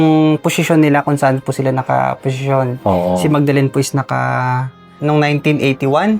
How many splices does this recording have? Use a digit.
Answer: 1